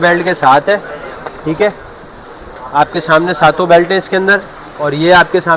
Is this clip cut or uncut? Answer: uncut